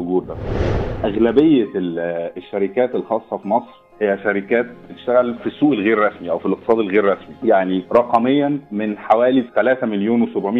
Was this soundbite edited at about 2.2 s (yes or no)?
no